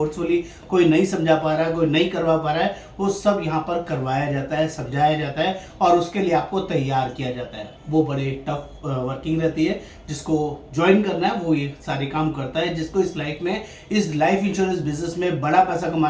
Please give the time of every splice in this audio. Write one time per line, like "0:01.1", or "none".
none